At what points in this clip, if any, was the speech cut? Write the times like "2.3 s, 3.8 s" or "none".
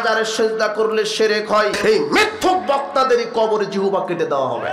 1.7 s